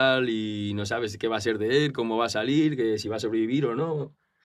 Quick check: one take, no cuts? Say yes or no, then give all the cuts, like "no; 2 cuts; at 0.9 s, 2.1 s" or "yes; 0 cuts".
yes; 0 cuts